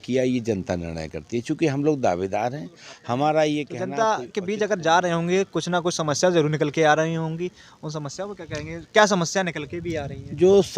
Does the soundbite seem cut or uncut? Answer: cut